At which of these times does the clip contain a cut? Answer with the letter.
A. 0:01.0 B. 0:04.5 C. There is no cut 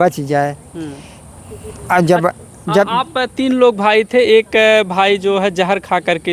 C